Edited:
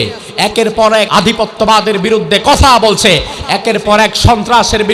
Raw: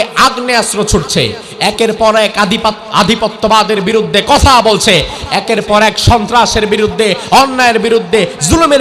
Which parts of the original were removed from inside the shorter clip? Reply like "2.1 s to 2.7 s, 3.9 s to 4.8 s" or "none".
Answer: 2.3 s to 2.9 s